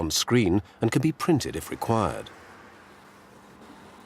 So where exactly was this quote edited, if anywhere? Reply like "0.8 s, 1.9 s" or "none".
2.3 s